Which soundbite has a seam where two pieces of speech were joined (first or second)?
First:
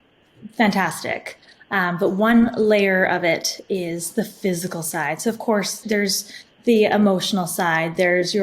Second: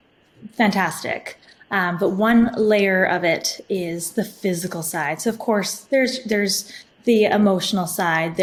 first